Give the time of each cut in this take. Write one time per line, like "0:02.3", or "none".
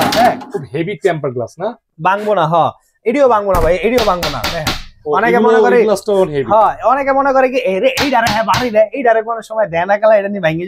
none